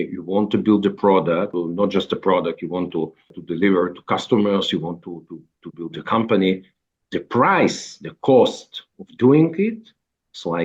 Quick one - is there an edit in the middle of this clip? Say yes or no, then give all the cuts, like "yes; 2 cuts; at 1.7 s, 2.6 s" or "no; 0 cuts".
yes; 2 cuts; at 1.5 s, 3.4 s